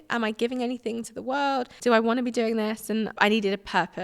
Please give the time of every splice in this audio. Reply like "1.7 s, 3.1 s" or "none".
1.7 s, 3.1 s